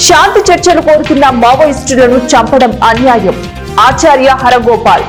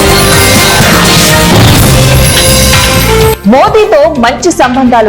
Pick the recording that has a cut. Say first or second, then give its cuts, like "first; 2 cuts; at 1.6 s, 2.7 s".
second; 1 cut; at 1.0 s